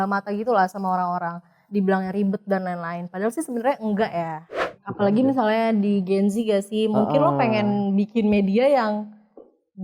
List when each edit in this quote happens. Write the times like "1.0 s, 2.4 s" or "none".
4.5 s